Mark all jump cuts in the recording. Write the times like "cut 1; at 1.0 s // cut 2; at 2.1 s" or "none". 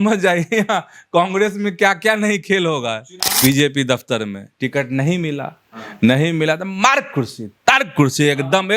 cut 1; at 3.3 s